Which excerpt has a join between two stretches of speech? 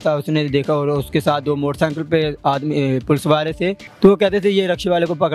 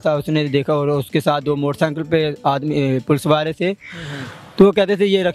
first; 1 cut; at 3.8 s

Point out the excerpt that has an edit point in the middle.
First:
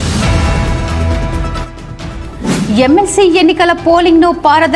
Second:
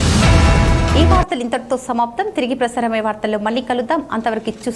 first; 1 cut; at 0.9 s

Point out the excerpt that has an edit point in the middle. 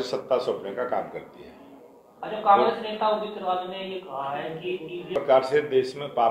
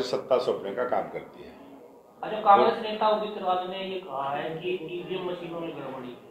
first; 1 cut; at 5.1 s

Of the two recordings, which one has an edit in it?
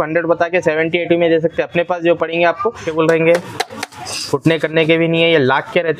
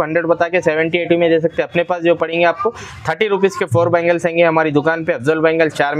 first; 1 cut; at 2.9 s

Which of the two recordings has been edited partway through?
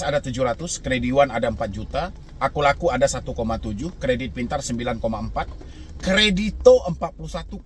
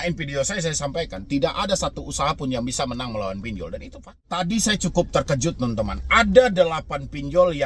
second; 1 cut; at 4.3 s

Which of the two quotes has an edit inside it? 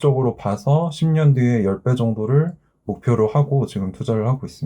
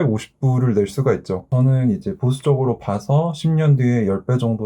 second; 1 cut; at 1.5 s

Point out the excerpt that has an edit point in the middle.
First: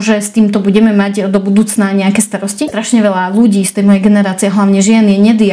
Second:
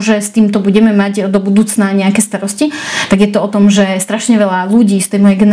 first; 1 cut; at 2.7 s

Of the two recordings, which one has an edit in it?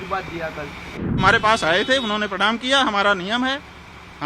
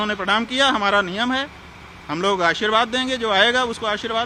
first; 1 cut; at 1.2 s

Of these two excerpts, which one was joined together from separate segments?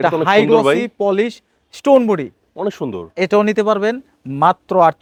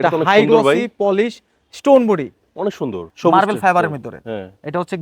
second; 1 cut; at 3.1 s

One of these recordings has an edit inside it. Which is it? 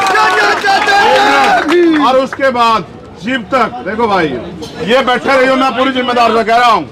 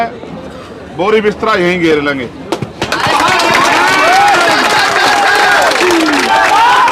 first; 1 cut; at 4.7 s

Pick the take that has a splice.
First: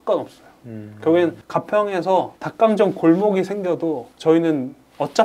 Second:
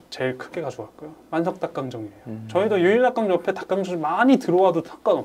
first; 3 cuts; at 1.4 s, 2.4 s, 4.1 s

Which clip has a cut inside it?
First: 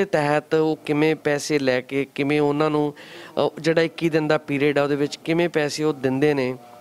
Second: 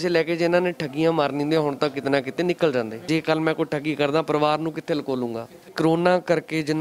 second; 2 cuts; at 3.1 s, 5.7 s

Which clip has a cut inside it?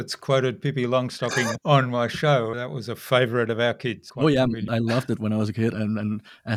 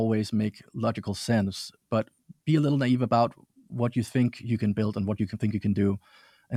first; 5 cuts; at 1.5 s, 2.6 s, 4.0 s, 4.6 s, 5.7 s

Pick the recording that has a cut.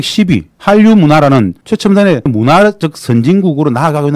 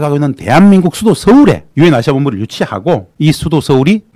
first; 1 cut; at 2.3 s

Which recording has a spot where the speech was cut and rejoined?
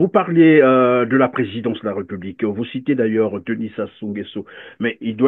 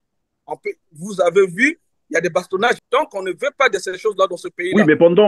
second; 1 cut; at 2.8 s

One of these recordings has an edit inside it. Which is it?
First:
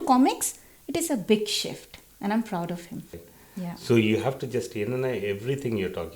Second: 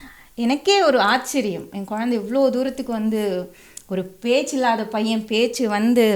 first; 1 cut; at 3.3 s

